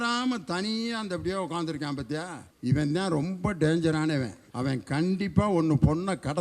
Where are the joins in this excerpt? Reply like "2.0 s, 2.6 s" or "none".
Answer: 2.4 s, 4.4 s